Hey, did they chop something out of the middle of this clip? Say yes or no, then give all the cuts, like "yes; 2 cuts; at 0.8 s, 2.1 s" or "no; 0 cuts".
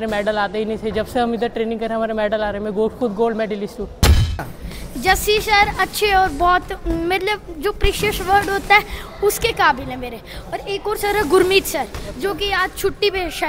yes; 1 cut; at 4.3 s